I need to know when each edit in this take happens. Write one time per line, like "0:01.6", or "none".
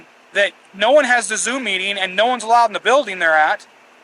none